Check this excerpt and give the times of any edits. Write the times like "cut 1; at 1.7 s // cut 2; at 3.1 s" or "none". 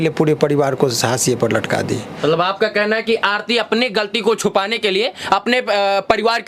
none